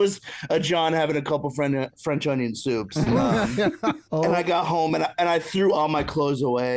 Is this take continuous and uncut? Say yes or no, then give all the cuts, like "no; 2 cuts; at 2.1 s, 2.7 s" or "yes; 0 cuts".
no; 1 cut; at 4.0 s